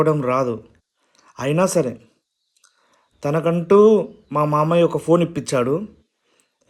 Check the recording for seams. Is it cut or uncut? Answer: uncut